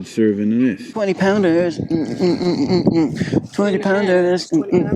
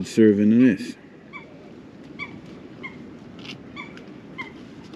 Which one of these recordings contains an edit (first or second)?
first